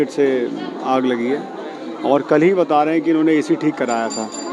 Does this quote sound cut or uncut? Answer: uncut